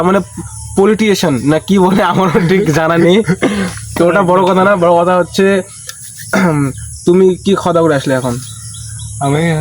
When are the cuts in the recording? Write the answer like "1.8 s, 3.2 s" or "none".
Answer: 1.6 s